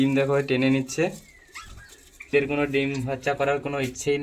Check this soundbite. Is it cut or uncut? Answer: cut